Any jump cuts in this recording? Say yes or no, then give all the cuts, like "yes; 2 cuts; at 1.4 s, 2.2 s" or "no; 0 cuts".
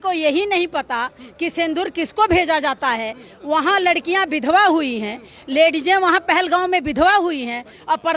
no; 0 cuts